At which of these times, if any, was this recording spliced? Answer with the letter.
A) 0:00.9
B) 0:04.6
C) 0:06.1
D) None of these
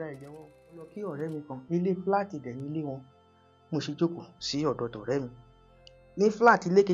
A